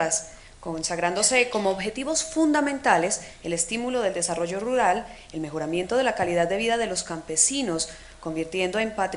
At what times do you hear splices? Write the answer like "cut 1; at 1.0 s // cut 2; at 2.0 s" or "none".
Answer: none